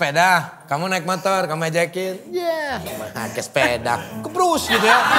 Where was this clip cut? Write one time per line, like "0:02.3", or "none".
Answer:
none